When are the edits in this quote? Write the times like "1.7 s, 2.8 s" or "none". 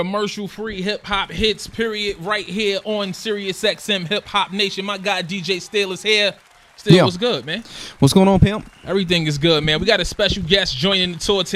none

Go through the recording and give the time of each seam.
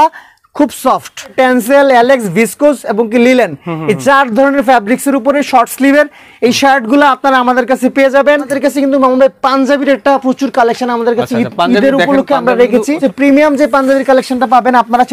1.3 s, 8.5 s, 13.0 s

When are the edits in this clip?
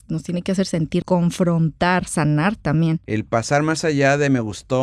1.0 s, 3.0 s

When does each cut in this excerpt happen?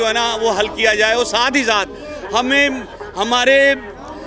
none

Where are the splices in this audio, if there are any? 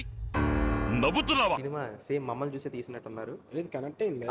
1.6 s

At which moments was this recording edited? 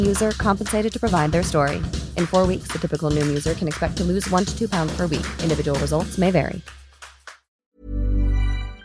7.7 s

